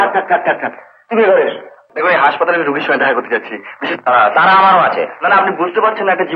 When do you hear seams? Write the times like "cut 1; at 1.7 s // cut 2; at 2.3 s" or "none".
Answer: cut 1; at 1.8 s